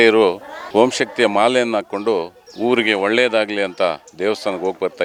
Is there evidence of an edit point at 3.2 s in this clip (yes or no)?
no